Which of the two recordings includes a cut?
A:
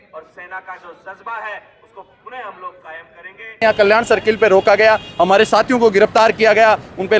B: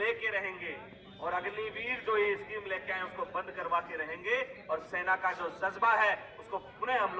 A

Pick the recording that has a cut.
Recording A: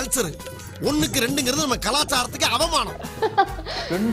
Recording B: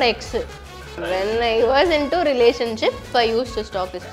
B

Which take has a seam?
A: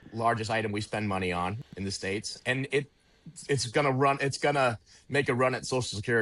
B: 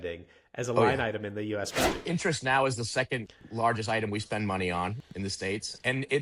B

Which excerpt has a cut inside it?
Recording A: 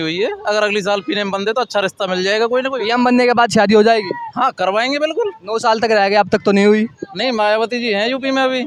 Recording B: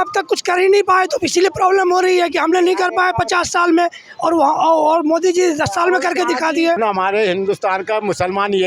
B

